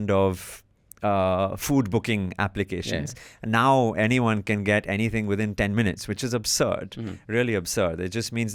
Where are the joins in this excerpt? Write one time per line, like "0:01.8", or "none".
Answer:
none